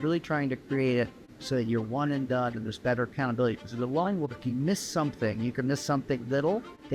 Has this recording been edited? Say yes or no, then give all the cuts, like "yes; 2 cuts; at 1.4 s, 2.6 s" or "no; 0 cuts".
no; 0 cuts